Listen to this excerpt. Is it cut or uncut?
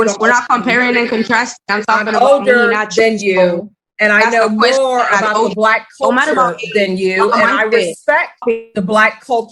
uncut